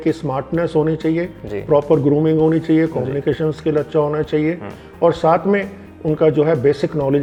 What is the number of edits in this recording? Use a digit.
0